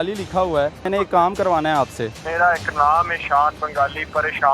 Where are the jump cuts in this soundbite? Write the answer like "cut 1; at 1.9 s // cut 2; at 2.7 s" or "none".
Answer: cut 1; at 0.8 s // cut 2; at 2.2 s